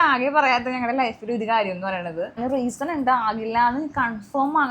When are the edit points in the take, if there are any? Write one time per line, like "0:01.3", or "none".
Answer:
0:02.4